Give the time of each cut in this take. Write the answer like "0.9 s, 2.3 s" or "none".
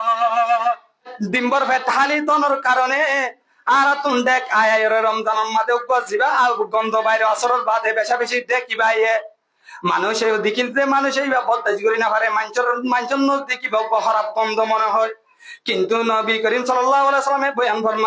1.2 s